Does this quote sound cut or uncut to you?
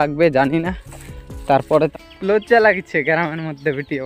cut